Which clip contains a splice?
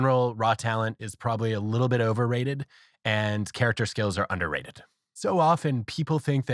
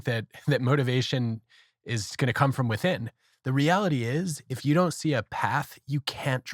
first; 1 cut; at 5.1 s

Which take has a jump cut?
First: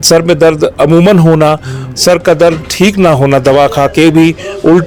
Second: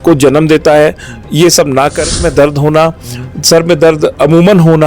second; 1 cut; at 2.0 s

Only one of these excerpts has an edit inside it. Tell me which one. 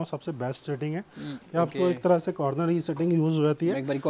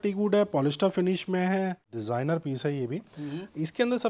second; 1 cut; at 1.9 s

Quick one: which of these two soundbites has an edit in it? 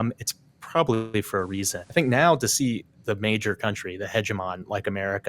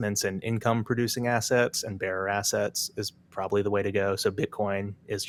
first; 1 cut; at 1.8 s

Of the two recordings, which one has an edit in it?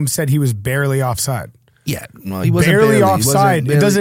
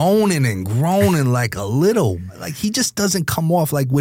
second; 1 cut; at 2.4 s

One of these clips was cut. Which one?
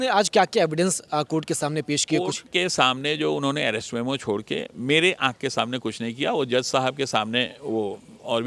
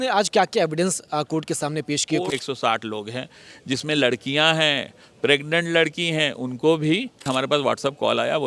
second; 2 cuts; at 2.4 s, 7.2 s

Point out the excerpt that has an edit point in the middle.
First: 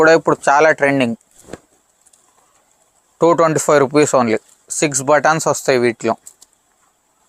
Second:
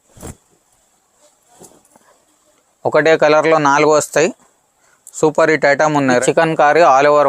second; 1 cut; at 6.2 s

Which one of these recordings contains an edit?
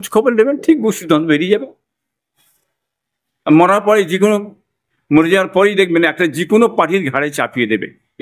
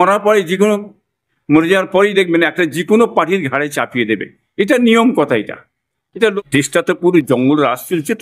second; 1 cut; at 6.3 s

